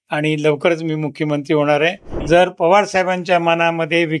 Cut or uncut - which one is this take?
cut